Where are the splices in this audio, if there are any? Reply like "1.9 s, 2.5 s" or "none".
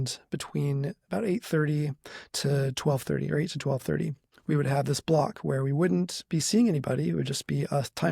4.3 s